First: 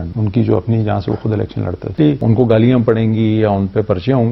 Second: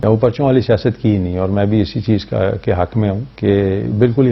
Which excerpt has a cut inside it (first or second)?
first